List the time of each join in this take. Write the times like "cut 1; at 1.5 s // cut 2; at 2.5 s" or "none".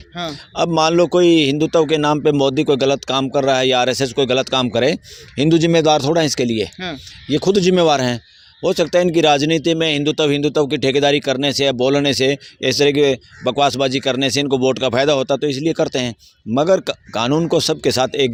none